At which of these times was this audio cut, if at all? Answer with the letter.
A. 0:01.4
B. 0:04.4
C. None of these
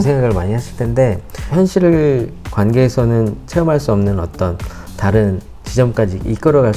A